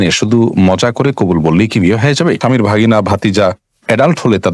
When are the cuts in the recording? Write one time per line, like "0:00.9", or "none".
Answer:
0:02.4